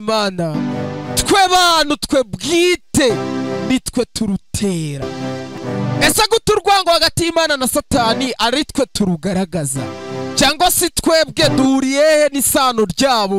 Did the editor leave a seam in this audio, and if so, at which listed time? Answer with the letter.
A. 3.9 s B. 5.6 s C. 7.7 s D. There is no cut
B